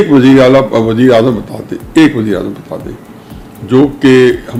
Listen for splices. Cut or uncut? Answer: uncut